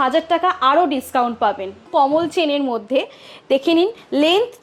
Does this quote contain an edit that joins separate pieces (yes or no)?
yes